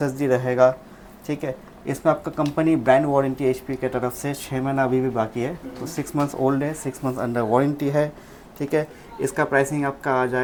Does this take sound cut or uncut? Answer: uncut